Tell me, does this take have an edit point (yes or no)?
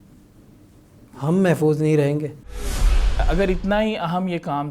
yes